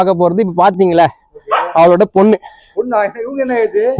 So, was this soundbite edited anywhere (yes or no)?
no